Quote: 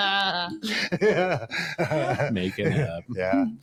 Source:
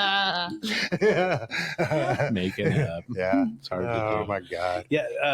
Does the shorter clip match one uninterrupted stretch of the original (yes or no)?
yes